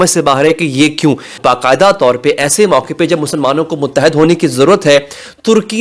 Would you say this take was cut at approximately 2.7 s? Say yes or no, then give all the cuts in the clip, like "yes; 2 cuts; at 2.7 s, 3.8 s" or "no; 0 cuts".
no; 1 cut; at 1.4 s